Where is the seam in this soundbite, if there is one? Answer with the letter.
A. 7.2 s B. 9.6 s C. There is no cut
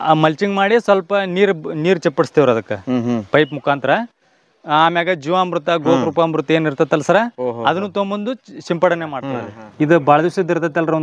B